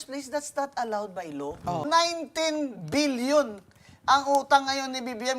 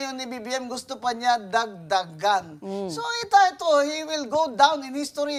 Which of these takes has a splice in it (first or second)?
first